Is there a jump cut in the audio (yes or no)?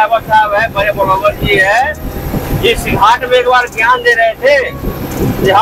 no